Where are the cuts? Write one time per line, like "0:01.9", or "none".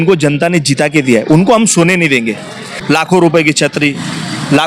0:03.0